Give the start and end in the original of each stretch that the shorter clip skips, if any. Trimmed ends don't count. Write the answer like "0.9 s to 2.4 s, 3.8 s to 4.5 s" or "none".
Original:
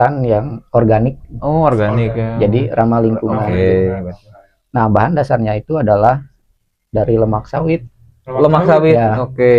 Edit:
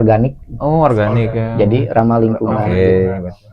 none